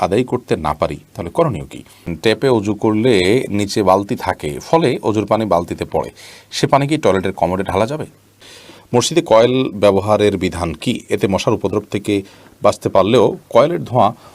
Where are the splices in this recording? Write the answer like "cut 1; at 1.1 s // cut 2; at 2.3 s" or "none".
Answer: cut 1; at 2.1 s // cut 2; at 8.5 s